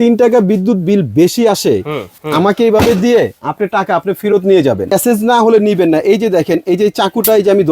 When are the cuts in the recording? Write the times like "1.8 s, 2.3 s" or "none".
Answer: 2.1 s, 4.9 s

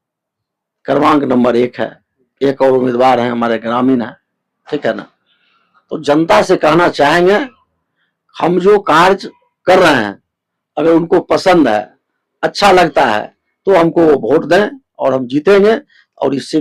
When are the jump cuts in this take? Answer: none

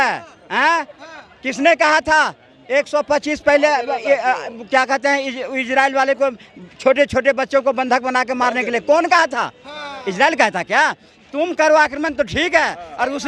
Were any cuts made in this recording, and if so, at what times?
none

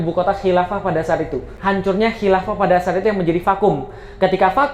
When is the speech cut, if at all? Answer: 1.5 s

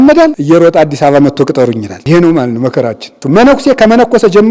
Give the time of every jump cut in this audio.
3.2 s

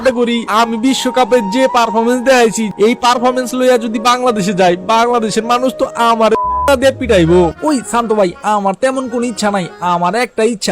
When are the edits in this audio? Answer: 2.7 s, 7.5 s

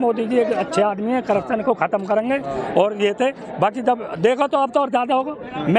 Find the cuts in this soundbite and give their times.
none

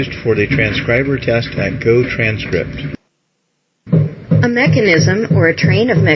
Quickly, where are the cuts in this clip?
1.5 s

